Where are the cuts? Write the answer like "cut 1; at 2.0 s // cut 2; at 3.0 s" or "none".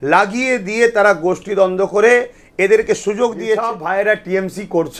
cut 1; at 3.7 s